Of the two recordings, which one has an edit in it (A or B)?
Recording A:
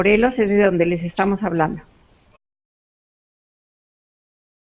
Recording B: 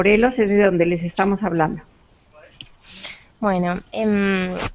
B